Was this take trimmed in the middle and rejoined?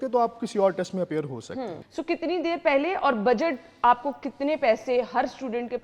yes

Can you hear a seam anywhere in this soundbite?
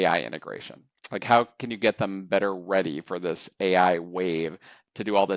no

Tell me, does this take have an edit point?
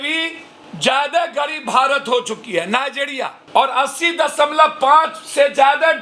no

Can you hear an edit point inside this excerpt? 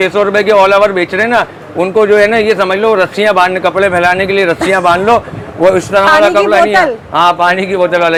no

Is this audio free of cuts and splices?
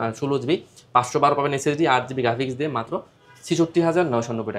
yes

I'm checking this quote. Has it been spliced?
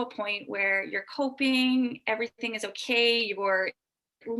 no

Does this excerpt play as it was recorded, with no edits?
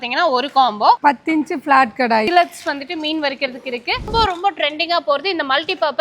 no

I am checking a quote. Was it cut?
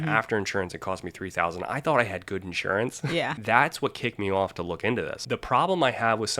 yes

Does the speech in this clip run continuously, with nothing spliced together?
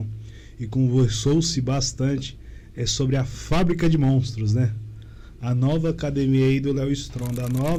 yes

